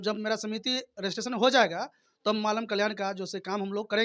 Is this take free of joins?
yes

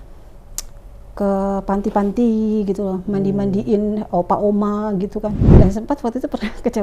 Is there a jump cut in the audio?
yes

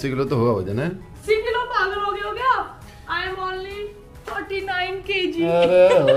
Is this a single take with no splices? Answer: no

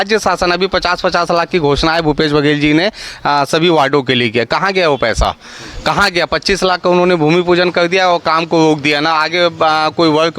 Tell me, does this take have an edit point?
no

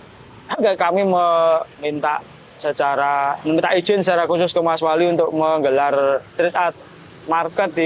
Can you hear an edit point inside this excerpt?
no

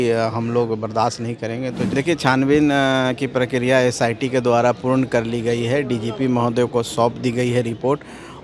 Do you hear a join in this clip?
yes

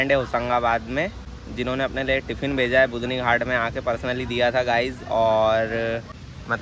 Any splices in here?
no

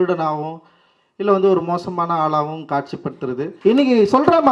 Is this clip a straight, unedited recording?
no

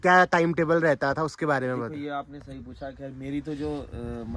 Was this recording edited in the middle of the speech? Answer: no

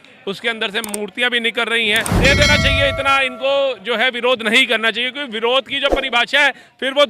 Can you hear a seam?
yes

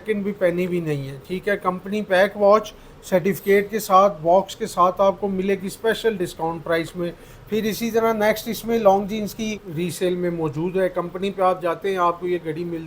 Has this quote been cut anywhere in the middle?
yes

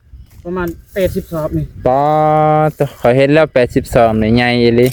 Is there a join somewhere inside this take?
no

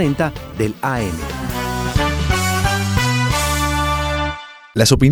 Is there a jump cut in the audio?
no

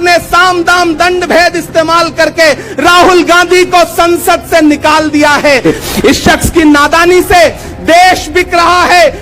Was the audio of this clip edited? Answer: yes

